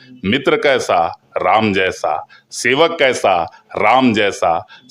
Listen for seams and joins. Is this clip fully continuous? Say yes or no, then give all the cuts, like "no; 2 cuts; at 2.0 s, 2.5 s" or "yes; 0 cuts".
yes; 0 cuts